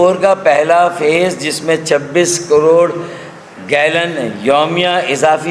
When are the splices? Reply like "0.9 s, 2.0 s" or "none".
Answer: none